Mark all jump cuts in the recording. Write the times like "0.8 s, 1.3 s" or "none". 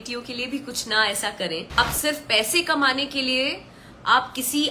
1.8 s